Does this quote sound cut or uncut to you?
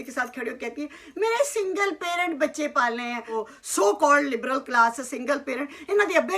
cut